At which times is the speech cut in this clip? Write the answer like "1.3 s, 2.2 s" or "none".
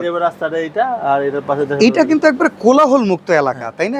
none